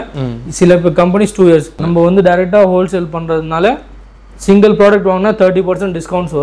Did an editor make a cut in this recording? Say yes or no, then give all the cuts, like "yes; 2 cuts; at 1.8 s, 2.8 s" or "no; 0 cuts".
yes; 1 cut; at 1.8 s